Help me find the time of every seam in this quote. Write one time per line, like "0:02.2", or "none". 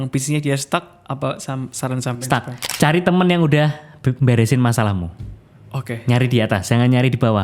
0:02.6